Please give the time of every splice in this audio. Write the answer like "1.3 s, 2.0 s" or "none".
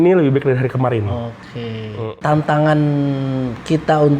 2.0 s